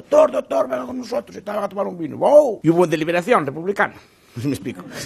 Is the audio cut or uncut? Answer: cut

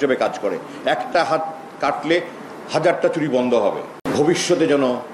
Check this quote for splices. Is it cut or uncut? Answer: cut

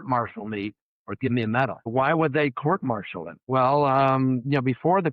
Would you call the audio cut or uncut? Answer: cut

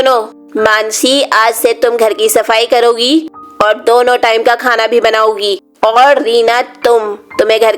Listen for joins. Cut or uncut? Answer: uncut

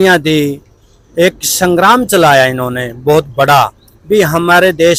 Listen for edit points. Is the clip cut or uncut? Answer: uncut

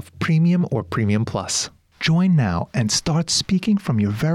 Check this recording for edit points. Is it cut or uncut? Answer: cut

